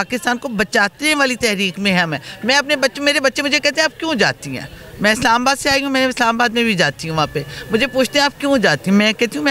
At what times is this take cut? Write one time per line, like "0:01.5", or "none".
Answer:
none